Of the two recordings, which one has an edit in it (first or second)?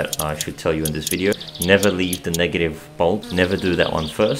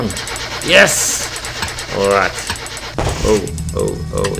first